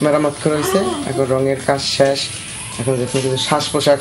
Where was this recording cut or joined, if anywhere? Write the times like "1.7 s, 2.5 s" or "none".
none